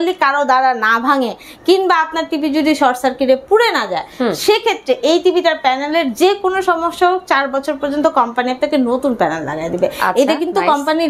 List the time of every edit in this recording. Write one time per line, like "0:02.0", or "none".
none